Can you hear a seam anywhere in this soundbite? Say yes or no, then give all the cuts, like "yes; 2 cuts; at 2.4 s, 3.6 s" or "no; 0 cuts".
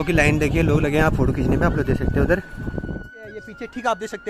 yes; 1 cut; at 2.9 s